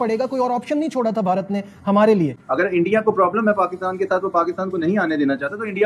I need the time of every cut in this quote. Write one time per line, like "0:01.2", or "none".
0:02.4